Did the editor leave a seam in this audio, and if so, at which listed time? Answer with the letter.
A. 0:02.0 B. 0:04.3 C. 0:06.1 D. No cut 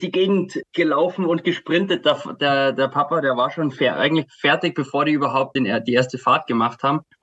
D